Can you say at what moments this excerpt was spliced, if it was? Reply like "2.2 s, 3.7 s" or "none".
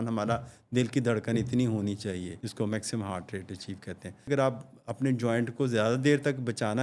2.4 s, 4.3 s